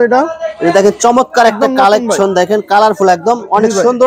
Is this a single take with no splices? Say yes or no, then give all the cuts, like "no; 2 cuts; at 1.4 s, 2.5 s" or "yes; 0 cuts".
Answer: yes; 0 cuts